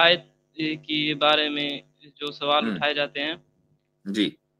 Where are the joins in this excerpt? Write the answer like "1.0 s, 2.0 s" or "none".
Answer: none